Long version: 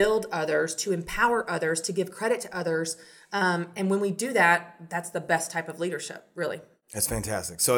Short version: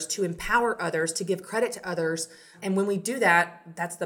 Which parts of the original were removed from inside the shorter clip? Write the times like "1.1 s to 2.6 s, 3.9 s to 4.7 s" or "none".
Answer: 3.2 s to 3.7 s